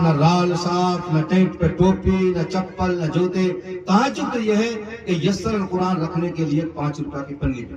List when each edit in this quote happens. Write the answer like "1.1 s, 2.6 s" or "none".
none